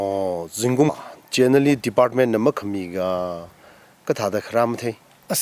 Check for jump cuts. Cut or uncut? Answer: cut